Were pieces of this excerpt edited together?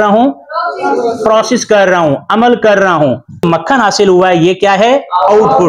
yes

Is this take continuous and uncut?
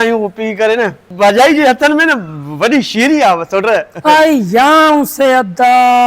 no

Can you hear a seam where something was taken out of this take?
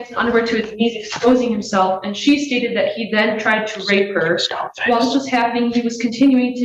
no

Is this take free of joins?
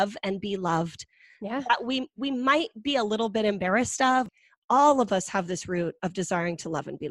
no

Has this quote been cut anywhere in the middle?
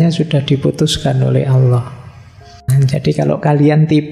yes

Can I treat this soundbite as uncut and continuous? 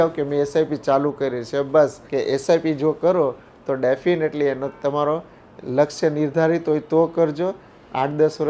no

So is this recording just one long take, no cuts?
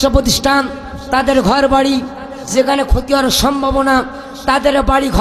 yes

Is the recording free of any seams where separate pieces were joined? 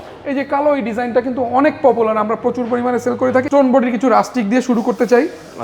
no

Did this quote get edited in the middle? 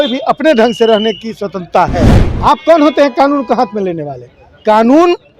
yes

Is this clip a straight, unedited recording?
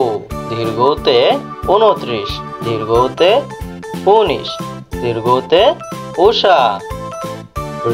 yes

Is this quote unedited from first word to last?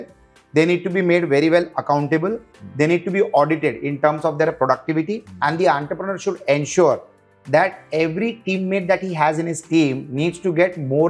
yes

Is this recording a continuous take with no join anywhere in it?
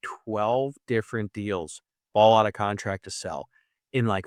yes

